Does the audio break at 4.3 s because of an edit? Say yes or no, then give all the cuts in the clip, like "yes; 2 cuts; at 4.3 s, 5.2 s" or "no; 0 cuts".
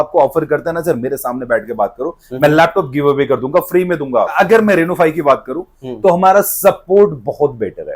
yes; 1 cut; at 4.3 s